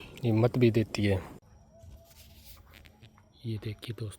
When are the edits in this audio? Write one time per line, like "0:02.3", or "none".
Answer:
0:01.4